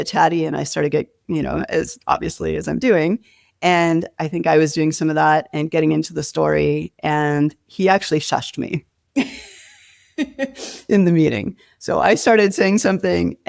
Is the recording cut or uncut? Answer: uncut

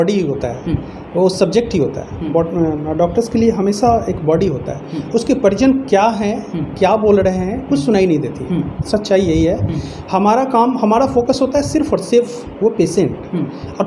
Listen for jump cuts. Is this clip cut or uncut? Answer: uncut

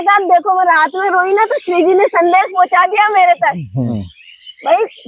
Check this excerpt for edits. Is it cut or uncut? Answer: cut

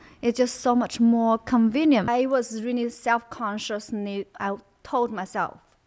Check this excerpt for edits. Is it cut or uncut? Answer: cut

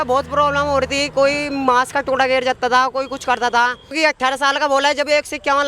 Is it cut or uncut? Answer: cut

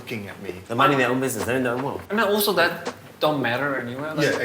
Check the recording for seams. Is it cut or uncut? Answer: cut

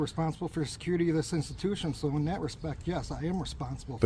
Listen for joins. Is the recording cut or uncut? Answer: uncut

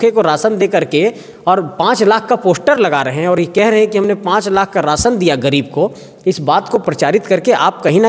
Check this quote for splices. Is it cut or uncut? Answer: uncut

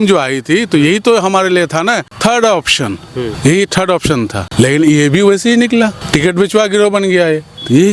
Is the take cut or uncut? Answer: cut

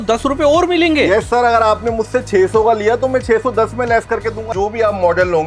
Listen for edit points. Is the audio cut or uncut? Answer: cut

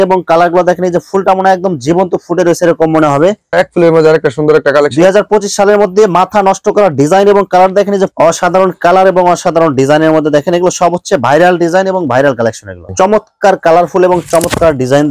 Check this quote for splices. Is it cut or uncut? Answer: cut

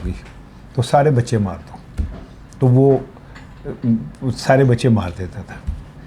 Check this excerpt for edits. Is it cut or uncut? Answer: uncut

